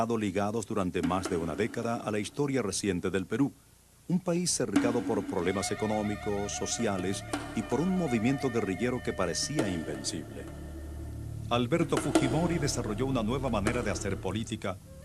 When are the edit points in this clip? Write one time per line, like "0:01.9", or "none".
0:10.8

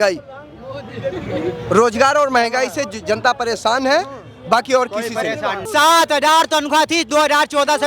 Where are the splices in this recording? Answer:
0:05.7

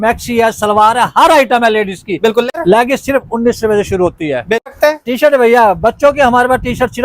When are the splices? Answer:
0:02.5
0:04.7

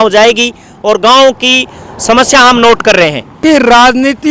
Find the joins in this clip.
0:03.4

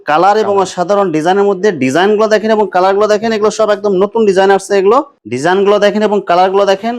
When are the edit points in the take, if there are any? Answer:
0:05.2

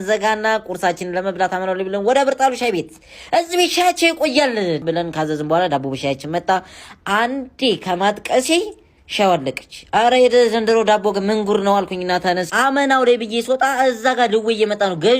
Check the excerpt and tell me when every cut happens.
0:01.2

